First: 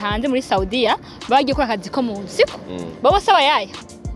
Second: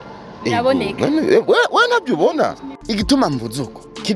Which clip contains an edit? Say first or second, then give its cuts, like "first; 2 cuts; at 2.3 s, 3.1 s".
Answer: second; 1 cut; at 2.7 s